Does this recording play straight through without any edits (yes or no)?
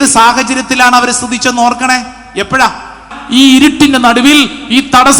no